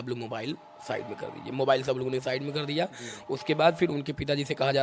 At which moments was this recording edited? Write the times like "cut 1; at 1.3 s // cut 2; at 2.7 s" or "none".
none